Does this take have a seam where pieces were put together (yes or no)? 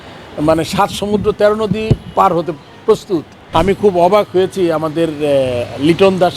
yes